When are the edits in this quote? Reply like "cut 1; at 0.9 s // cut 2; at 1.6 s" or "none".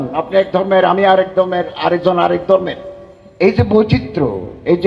none